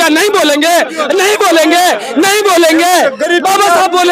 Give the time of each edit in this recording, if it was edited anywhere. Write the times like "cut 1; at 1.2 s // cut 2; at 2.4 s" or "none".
none